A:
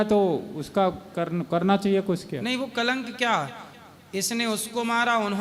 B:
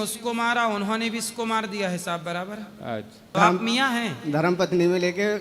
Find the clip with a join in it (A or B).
B